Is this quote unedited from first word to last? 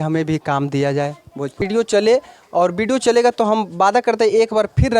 no; 1 cut; at 1.6 s

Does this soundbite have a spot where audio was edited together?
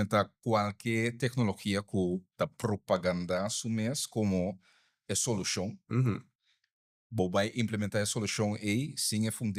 no; 0 cuts

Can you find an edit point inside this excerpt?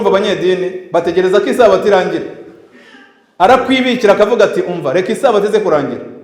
no; 0 cuts

